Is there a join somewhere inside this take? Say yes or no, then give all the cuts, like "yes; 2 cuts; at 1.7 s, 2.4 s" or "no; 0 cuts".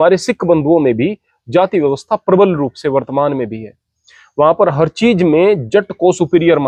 no; 0 cuts